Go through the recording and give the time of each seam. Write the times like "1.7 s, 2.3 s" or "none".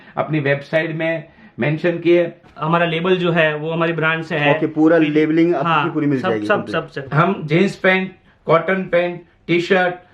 2.4 s, 7.0 s